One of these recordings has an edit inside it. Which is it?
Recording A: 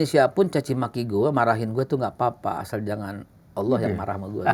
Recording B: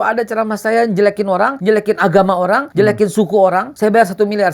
B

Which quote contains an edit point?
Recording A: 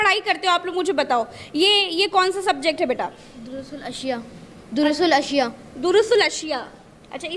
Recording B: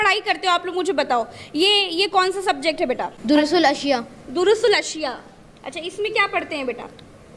B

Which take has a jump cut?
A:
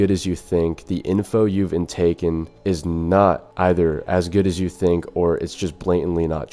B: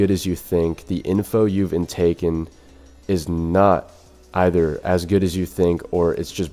A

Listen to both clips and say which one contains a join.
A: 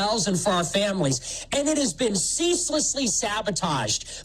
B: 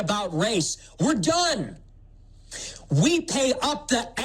B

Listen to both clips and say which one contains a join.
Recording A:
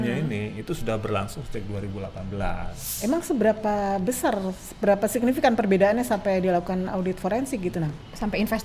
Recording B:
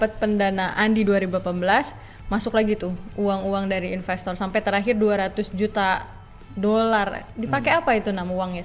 A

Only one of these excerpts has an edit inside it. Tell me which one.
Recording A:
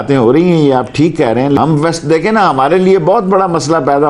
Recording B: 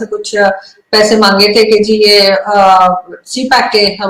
A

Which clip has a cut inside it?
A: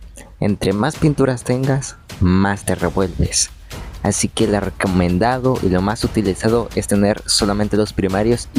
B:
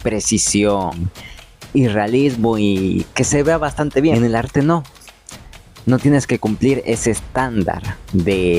B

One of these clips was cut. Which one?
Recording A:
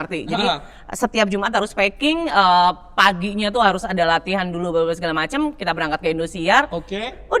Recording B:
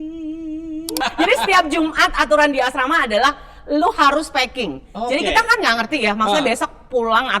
B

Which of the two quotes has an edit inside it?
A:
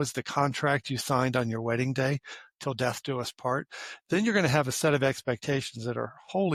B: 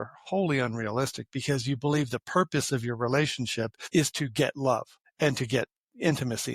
B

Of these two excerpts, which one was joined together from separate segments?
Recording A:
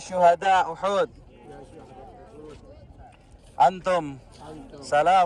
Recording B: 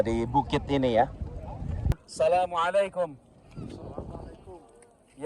B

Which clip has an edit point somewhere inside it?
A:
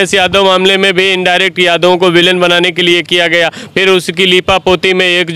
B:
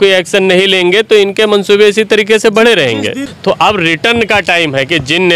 B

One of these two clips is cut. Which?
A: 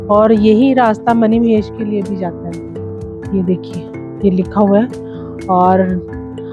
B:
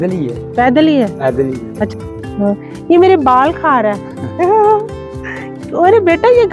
B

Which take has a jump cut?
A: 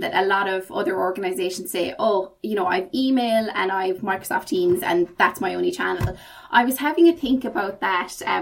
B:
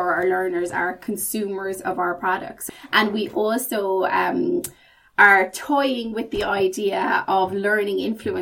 B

